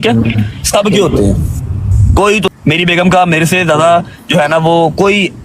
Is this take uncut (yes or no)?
no